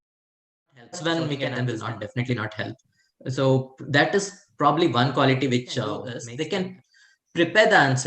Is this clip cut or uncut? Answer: cut